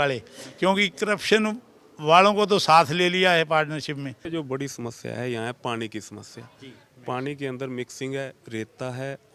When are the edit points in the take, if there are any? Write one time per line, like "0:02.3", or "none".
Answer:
0:04.2